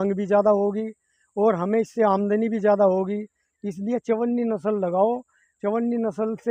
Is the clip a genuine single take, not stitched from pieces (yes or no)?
yes